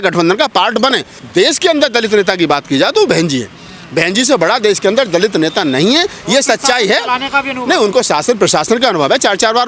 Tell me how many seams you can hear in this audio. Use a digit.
1